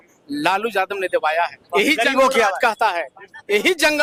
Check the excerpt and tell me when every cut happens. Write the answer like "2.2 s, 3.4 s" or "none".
none